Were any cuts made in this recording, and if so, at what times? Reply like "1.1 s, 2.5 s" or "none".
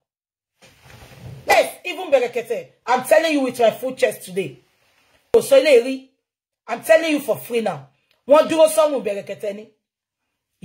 1.4 s, 5.3 s